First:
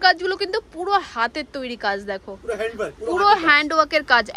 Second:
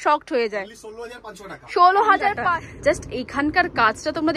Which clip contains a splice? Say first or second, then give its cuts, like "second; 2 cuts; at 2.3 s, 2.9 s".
second; 1 cut; at 2.4 s